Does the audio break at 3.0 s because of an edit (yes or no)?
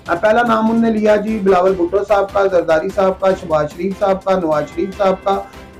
no